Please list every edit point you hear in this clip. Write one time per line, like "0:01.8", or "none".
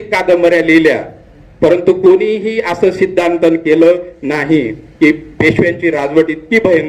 none